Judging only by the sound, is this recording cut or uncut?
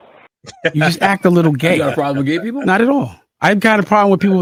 uncut